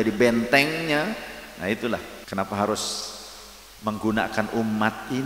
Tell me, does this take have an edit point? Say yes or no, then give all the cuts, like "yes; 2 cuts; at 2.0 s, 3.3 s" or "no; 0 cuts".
yes; 1 cut; at 2.2 s